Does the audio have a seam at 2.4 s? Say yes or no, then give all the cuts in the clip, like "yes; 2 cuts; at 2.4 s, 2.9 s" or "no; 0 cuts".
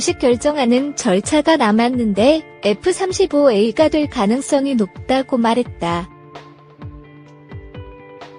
no; 1 cut; at 6.1 s